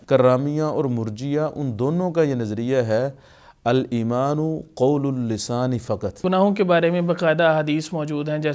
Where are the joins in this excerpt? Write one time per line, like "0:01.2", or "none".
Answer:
0:06.2